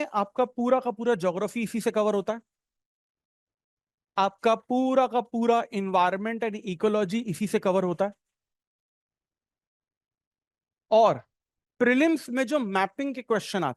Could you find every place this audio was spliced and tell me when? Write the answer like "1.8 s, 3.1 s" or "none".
none